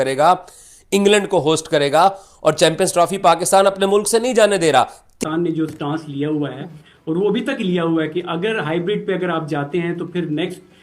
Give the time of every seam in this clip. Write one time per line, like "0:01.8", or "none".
0:05.0